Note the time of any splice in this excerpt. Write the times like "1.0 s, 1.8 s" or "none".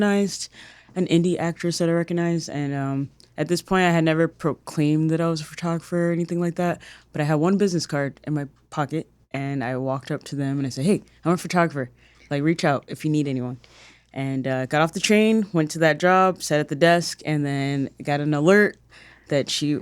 none